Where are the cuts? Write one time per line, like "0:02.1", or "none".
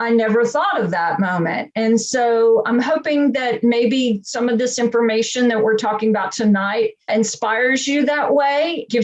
0:02.7
0:07.1